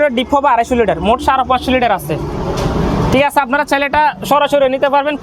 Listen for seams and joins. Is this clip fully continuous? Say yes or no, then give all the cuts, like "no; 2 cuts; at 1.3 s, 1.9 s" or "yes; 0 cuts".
yes; 0 cuts